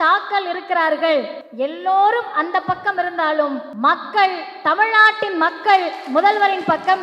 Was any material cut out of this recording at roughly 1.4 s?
yes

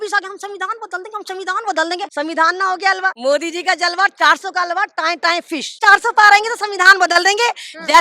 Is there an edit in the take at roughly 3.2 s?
yes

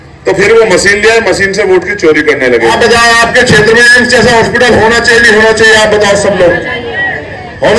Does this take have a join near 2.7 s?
yes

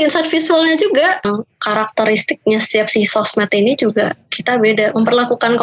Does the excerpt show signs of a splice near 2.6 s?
no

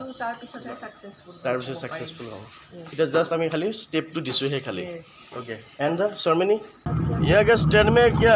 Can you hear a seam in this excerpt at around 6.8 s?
yes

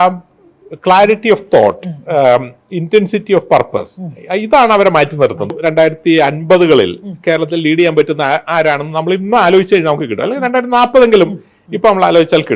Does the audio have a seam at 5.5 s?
yes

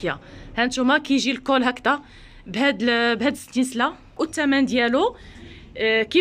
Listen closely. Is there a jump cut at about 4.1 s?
yes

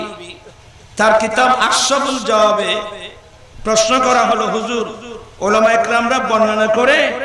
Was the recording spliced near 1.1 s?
no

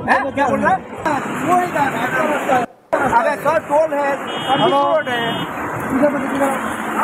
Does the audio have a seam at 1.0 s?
yes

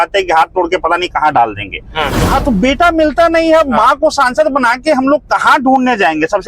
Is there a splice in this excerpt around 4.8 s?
no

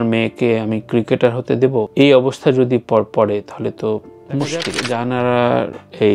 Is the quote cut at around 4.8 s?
yes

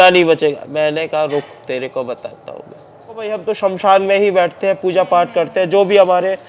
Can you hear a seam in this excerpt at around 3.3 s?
yes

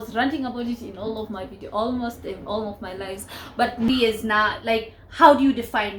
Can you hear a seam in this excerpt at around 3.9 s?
yes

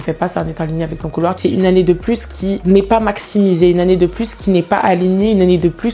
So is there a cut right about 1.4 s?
yes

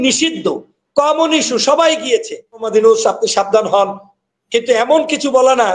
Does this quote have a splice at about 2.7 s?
yes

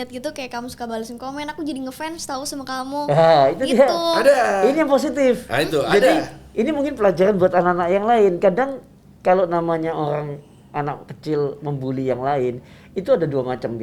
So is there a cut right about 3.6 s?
no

